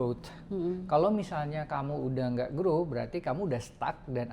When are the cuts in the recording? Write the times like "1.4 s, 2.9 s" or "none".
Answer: none

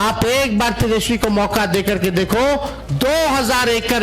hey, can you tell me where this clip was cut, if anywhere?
2.8 s

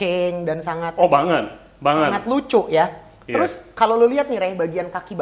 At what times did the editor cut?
none

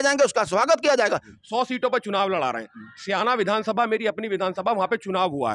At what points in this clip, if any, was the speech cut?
1.3 s

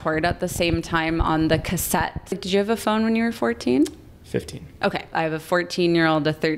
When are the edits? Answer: 2.4 s, 5.1 s

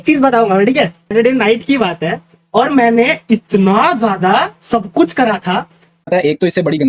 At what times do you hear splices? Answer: 1.1 s, 6.1 s

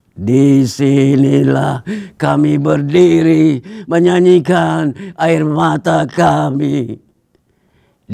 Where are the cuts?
none

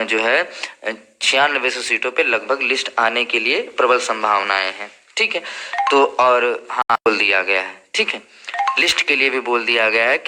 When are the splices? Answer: 7.1 s

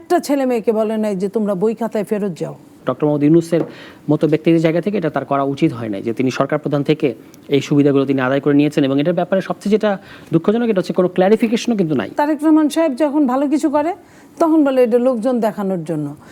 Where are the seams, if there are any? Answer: 2.8 s, 12.2 s

